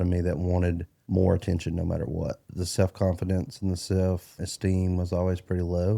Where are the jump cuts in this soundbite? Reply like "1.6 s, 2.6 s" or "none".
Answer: 0.9 s, 2.5 s, 4.3 s